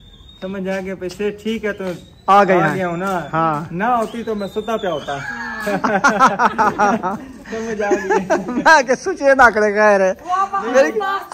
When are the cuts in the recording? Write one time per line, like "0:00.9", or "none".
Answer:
none